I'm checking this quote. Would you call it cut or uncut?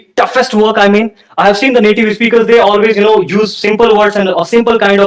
uncut